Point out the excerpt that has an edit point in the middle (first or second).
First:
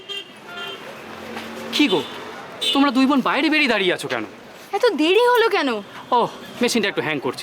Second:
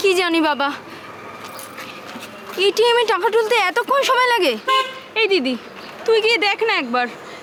first